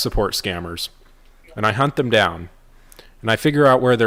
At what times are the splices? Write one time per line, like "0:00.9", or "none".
none